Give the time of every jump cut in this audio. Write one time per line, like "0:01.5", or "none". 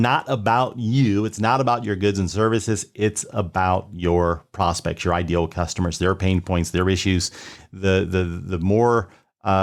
none